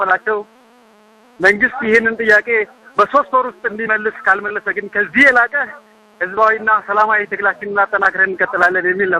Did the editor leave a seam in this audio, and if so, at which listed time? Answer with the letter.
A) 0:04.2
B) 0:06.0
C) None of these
C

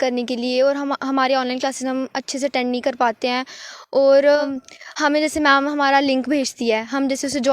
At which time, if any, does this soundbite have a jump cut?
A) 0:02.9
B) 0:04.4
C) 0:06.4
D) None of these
B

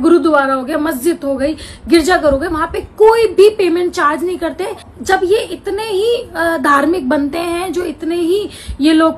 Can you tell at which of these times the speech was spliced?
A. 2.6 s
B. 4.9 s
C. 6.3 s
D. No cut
B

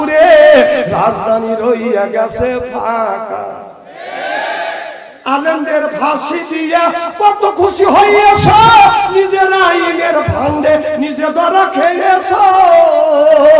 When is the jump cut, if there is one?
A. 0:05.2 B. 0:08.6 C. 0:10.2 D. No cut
D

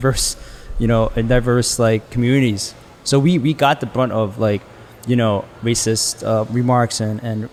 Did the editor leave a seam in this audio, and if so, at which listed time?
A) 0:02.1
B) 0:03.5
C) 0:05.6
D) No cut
D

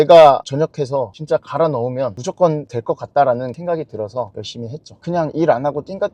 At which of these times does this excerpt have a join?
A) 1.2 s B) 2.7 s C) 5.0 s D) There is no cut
C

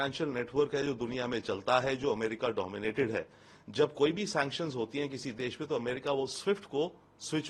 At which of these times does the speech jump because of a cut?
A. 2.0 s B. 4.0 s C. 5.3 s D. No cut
D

